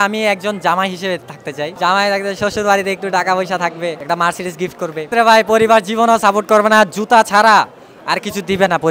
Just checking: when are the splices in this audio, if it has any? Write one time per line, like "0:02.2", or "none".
0:01.7
0:04.0
0:05.1